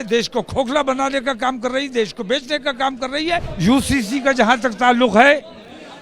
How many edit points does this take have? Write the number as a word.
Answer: one